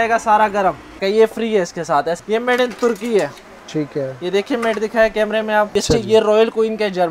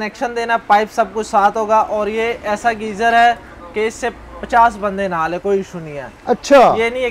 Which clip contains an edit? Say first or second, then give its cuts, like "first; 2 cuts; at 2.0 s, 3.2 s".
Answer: first; 3 cuts; at 1.0 s, 2.2 s, 5.7 s